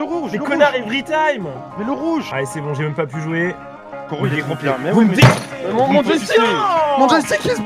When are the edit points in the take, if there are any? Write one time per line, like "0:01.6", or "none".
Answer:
0:02.3